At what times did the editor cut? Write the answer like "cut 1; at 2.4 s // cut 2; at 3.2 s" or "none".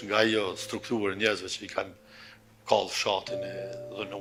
none